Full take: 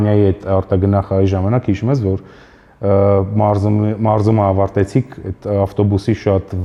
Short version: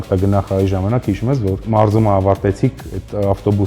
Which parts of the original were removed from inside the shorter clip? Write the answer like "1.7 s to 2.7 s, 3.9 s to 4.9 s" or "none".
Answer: 2.2 s to 4.0 s